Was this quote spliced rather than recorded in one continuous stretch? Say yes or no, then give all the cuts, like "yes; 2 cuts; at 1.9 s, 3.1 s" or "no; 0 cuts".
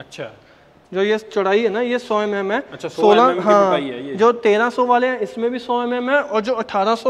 no; 0 cuts